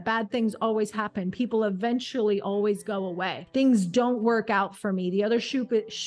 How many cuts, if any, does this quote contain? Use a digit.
1